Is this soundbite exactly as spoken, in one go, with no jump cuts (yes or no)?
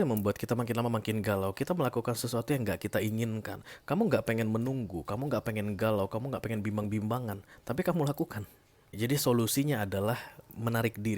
no